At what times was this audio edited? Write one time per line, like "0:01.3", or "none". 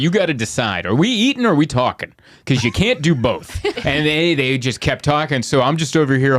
0:03.8